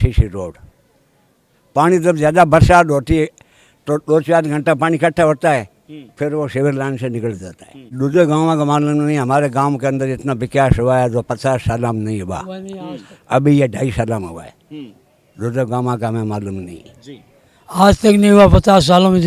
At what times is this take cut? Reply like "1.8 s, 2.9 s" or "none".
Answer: none